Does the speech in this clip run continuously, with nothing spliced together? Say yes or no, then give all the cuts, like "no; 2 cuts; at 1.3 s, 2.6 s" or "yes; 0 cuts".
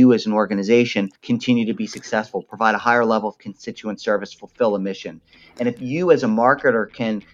no; 1 cut; at 1.2 s